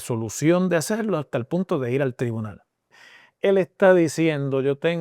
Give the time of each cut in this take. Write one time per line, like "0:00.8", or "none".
0:03.0